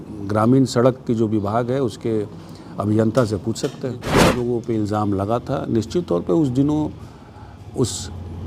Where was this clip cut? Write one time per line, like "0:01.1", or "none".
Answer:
0:04.3